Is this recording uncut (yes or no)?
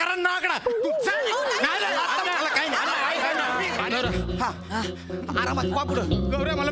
no